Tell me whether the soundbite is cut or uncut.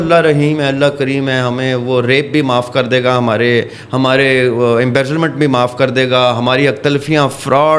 uncut